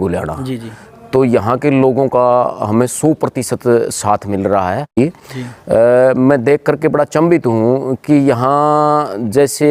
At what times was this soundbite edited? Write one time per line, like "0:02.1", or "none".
0:04.9